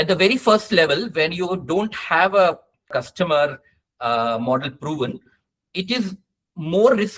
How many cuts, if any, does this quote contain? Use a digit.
1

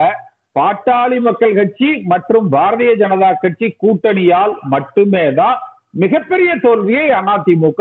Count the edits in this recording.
0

